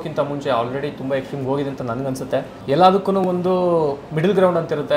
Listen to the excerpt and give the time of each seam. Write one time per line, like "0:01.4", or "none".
0:02.5
0:04.0